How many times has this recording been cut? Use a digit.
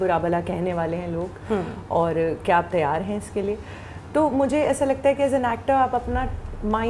0